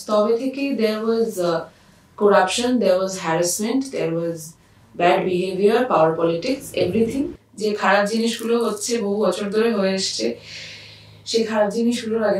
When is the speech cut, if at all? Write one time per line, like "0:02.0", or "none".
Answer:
0:07.4